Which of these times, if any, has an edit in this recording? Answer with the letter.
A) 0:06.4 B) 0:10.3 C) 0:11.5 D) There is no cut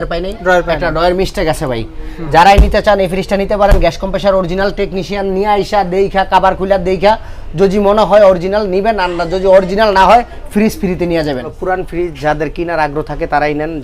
C